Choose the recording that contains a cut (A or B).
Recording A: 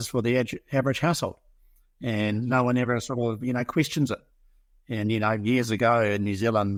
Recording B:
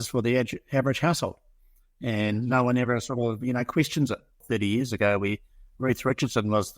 B